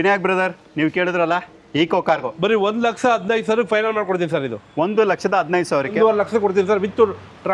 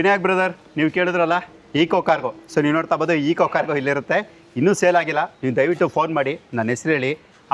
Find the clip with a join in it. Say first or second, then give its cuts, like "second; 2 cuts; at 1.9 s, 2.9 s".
first; 2 cuts; at 2.3 s, 5.9 s